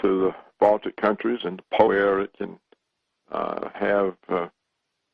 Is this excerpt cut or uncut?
uncut